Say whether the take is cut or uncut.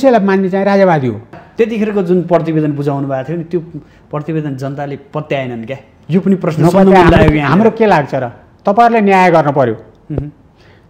cut